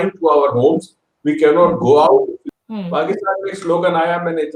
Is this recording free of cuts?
no; 1 cut; at 2.4 s

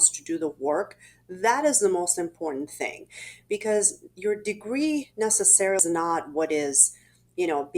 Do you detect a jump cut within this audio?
yes; 1 cut; at 5.8 s

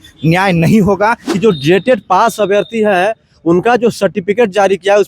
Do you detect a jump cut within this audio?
yes; 1 cut; at 1.2 s

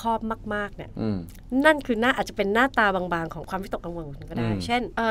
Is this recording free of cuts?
yes; 0 cuts

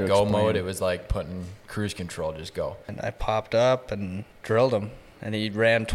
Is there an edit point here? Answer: yes; 2 cuts; at 2.9 s, 4.3 s

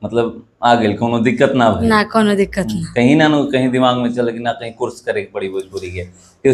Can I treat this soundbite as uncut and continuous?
yes; 0 cuts

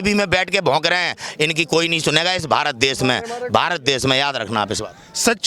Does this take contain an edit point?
no; 0 cuts

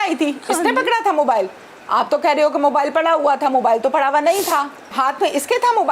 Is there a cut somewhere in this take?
yes; 1 cut; at 4.9 s

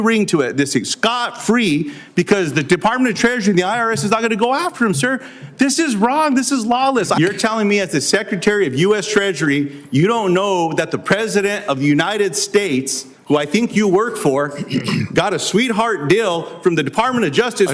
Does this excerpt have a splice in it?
yes; 1 cut; at 7.2 s

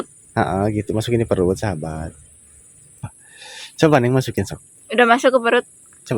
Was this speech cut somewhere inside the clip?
yes; 1 cut; at 3.1 s

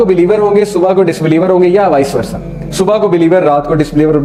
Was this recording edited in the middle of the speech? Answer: no; 0 cuts

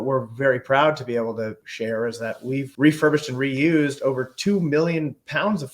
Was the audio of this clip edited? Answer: yes; 2 cuts; at 1.6 s, 2.7 s

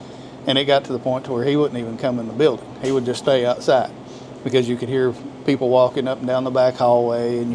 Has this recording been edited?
no; 0 cuts

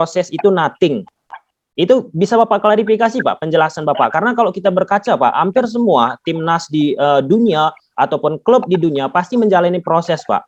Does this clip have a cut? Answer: no; 0 cuts

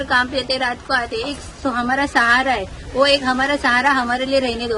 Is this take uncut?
yes; 0 cuts

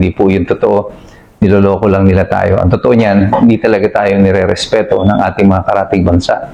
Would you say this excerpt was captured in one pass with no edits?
yes; 0 cuts

